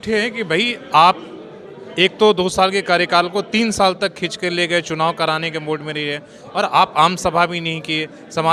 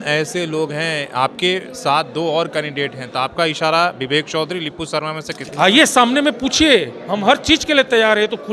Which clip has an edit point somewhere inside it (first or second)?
second